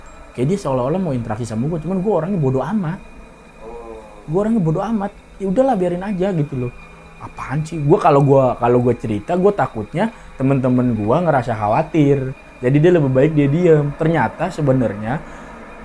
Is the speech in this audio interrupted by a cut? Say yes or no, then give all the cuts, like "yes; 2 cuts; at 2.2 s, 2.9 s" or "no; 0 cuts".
no; 0 cuts